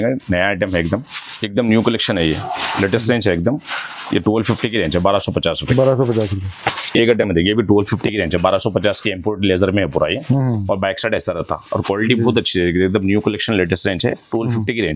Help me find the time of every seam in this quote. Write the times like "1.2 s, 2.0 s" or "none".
none